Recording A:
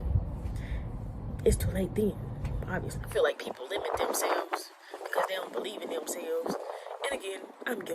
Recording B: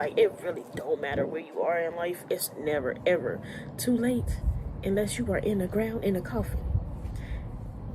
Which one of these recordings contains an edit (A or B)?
A